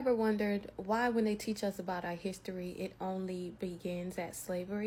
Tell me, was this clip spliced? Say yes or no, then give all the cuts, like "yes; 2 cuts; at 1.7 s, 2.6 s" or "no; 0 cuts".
no; 0 cuts